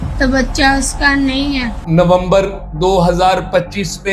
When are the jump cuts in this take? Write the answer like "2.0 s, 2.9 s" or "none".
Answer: 1.8 s